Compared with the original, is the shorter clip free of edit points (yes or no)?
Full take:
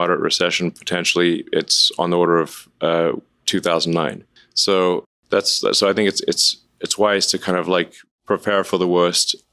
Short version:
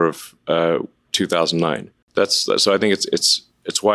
no